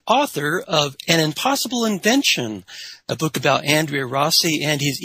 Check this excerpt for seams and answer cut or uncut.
cut